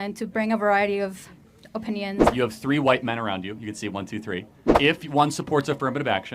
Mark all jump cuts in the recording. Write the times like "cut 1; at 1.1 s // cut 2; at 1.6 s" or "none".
cut 1; at 2.2 s // cut 2; at 4.6 s

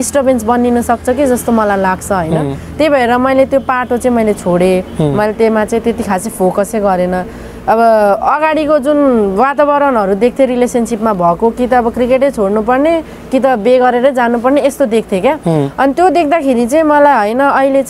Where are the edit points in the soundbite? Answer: none

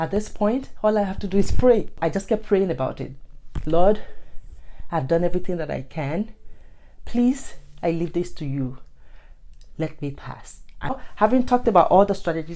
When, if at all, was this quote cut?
cut 1; at 2.0 s // cut 2; at 11.0 s

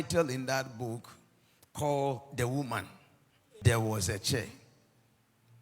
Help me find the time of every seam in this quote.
cut 1; at 3.4 s

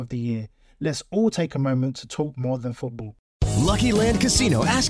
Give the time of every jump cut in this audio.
cut 1; at 3.1 s

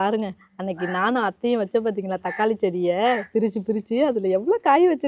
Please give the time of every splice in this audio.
none

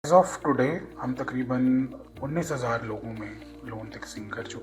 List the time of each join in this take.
cut 1; at 0.9 s // cut 2; at 2.0 s

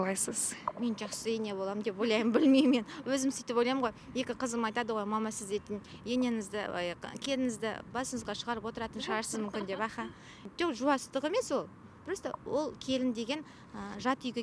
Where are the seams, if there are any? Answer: none

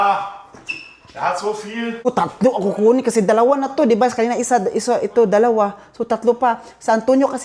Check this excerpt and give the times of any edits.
cut 1; at 2.1 s

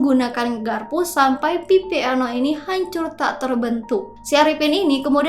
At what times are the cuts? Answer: cut 1; at 4.2 s

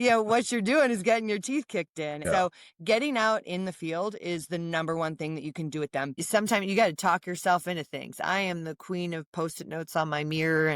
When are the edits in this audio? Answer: cut 1; at 2.2 s // cut 2; at 6.1 s

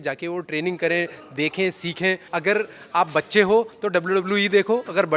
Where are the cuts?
cut 1; at 2.3 s

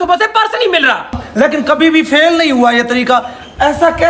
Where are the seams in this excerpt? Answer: cut 1; at 1.2 s

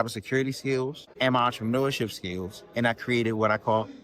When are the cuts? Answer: cut 1; at 1.0 s

